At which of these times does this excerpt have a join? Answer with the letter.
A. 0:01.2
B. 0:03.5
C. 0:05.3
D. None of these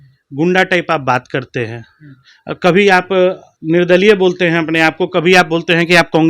B